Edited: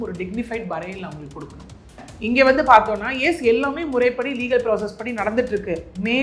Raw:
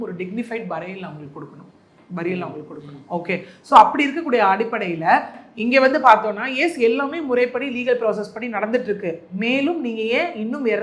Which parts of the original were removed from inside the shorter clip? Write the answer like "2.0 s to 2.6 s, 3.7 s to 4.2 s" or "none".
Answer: 2.0 s to 5.4 s